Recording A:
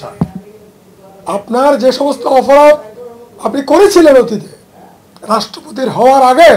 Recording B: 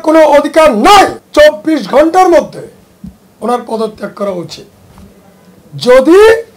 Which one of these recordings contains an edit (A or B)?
B